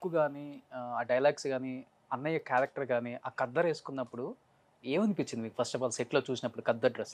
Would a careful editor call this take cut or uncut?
uncut